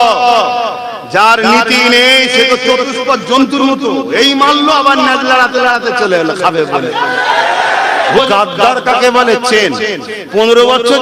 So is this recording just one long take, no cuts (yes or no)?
no